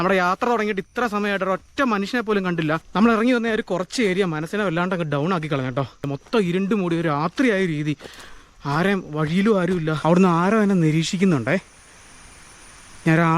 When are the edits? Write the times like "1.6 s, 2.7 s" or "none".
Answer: 2.8 s, 6.1 s, 10.0 s